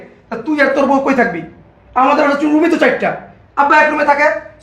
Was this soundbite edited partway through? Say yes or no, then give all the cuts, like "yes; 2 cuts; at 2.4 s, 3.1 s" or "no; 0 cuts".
no; 0 cuts